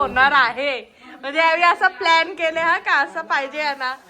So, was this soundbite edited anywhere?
no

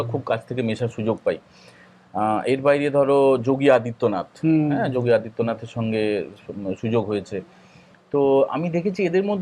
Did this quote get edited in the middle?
no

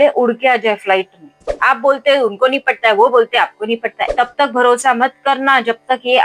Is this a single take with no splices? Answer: no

